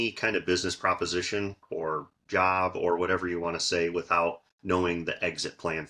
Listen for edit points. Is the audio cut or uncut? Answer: uncut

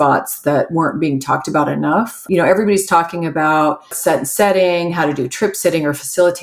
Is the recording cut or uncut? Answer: cut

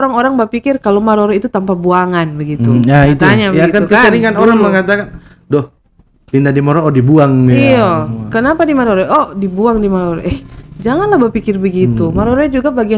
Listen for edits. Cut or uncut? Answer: uncut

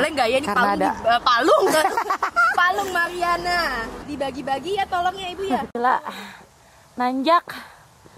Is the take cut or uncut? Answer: uncut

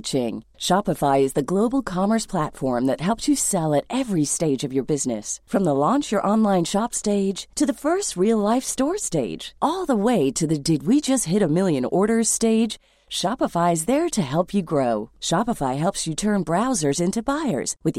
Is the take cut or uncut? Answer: uncut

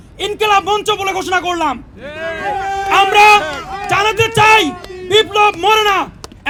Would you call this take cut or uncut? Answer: uncut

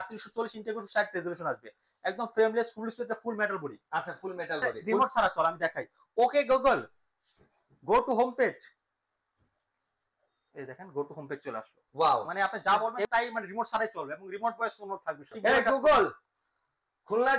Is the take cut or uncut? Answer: cut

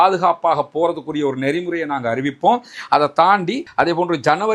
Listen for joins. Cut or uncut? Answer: cut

